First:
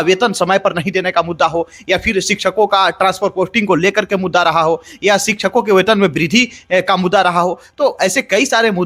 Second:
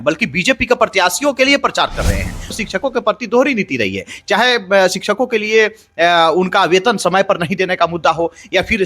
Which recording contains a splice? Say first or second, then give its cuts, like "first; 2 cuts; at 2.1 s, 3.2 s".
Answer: second; 1 cut; at 2.5 s